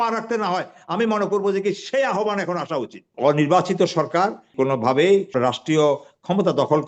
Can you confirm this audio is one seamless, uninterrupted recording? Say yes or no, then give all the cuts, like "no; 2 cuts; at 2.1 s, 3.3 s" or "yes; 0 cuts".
no; 3 cuts; at 3.1 s, 4.5 s, 5.3 s